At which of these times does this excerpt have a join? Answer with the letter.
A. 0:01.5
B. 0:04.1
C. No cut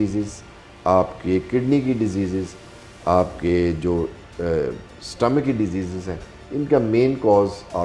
C